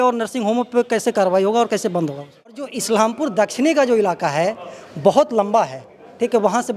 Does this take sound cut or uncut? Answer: cut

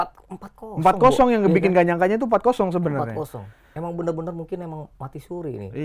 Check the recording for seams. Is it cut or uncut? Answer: uncut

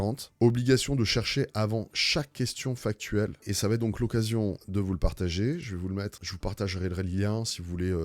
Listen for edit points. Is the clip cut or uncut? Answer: cut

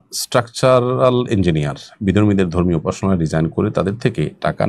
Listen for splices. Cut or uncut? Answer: uncut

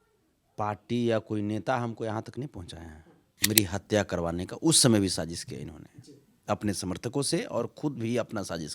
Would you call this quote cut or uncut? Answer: cut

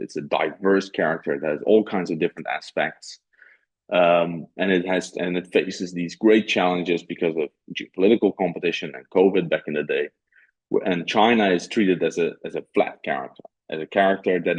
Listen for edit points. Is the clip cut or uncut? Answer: uncut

